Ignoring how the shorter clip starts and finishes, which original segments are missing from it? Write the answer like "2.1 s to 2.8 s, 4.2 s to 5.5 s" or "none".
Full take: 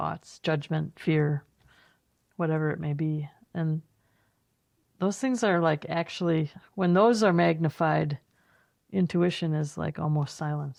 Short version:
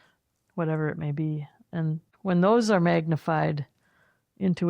3.9 s to 6.6 s

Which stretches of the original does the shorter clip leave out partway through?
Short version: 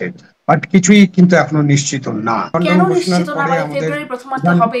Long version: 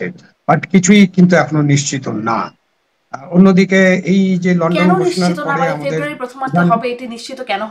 2.6 s to 4.6 s

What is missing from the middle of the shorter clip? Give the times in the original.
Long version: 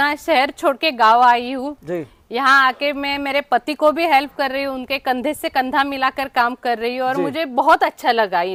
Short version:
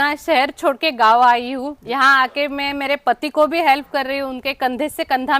1.8 s to 2.2 s

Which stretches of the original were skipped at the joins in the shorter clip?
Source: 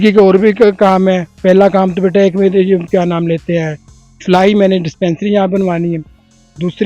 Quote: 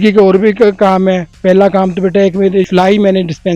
2.7 s to 4.2 s

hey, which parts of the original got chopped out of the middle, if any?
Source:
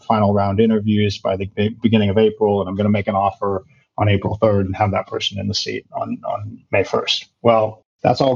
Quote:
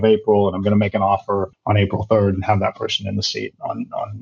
3.7 s to 3.9 s

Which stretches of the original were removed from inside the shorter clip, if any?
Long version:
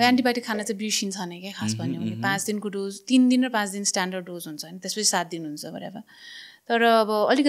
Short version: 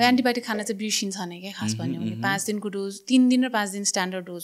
none

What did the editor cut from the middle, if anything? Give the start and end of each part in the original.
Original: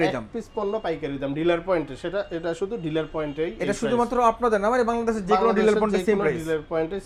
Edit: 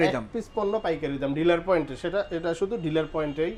none

